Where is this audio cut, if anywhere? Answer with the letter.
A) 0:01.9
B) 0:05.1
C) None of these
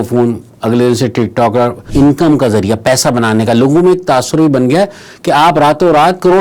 A